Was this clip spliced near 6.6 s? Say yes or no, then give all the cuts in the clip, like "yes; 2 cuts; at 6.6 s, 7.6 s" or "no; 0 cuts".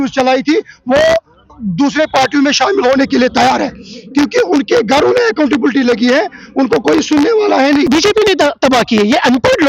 no; 1 cut; at 7.9 s